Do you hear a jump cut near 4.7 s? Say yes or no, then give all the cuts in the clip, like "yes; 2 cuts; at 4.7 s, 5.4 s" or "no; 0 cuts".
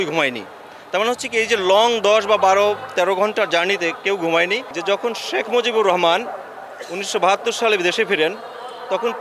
yes; 1 cut; at 4.7 s